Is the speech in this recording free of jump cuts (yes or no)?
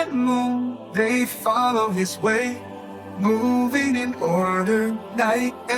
yes